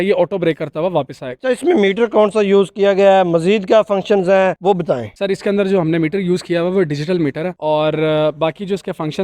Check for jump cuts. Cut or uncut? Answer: uncut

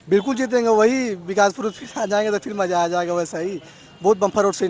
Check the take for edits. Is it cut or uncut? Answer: uncut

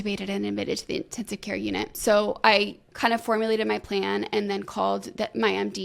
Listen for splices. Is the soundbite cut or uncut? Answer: cut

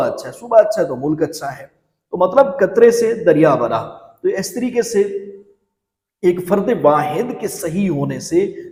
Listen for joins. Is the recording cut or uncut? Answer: uncut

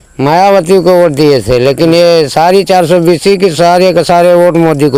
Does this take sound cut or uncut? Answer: uncut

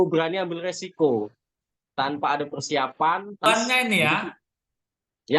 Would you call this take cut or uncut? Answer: cut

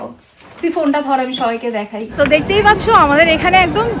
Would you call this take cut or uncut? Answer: cut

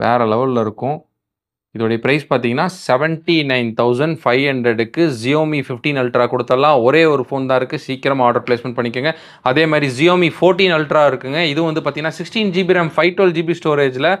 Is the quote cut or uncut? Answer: uncut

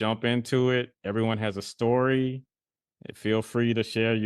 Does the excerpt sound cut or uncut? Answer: uncut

